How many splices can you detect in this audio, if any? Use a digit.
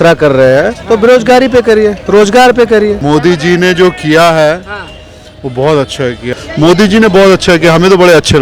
2